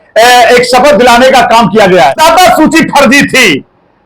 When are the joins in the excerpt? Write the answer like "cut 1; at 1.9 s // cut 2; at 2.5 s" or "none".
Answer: cut 1; at 2.2 s

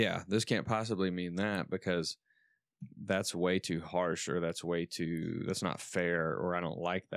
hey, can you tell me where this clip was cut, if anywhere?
none

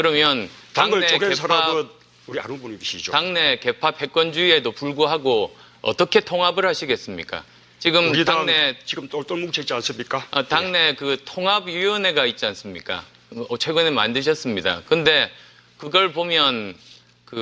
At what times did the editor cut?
none

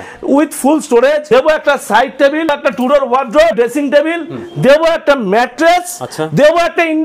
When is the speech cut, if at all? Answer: cut 1; at 1.2 s // cut 2; at 2.5 s // cut 3; at 3.5 s

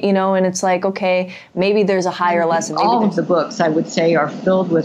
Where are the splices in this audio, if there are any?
cut 1; at 2.7 s

